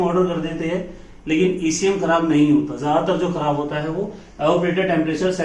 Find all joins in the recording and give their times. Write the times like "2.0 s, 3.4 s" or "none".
none